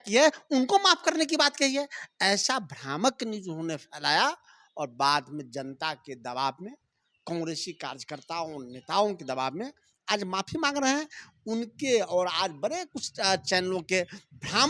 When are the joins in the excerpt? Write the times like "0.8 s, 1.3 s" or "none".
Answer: none